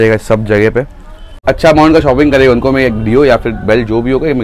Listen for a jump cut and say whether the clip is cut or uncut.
cut